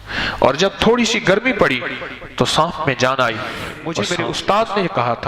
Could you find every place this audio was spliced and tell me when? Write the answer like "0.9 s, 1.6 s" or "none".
3.9 s